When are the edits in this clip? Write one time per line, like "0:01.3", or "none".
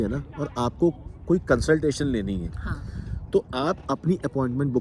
none